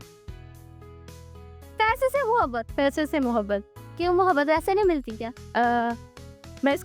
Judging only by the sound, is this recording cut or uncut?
uncut